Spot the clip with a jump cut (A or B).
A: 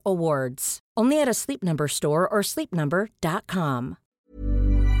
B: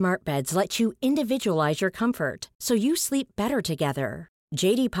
A